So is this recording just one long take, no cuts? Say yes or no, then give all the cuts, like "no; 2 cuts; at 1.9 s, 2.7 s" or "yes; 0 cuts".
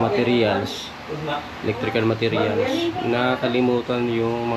yes; 0 cuts